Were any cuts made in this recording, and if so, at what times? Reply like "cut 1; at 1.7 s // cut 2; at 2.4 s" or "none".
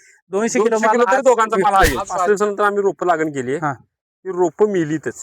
cut 1; at 2.3 s